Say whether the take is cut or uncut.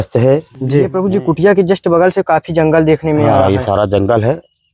cut